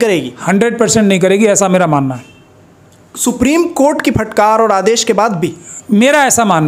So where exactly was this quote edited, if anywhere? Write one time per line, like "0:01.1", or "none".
none

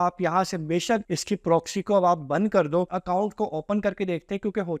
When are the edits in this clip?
0:03.0

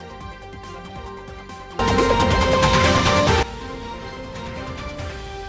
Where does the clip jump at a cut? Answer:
0:01.7

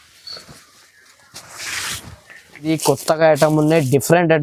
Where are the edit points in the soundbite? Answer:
0:02.7

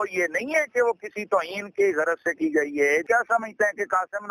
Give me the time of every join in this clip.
0:03.0

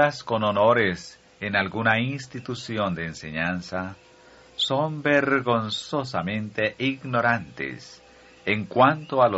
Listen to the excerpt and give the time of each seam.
0:02.8

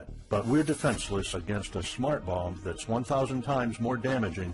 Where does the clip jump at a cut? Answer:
0:02.3

